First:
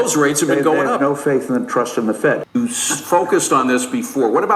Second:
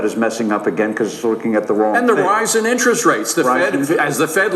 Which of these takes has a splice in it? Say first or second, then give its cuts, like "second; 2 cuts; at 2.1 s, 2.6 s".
first; 1 cut; at 2.4 s